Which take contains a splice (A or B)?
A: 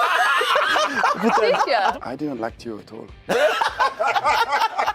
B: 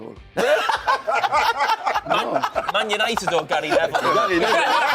A